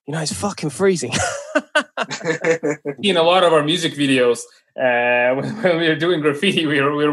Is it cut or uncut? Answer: cut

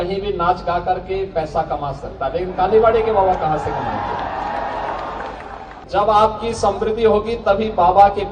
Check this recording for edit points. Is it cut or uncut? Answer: cut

